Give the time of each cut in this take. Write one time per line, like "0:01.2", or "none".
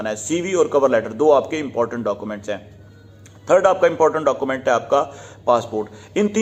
none